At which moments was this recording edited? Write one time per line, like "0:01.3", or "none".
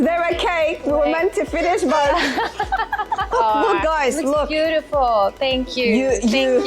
0:03.3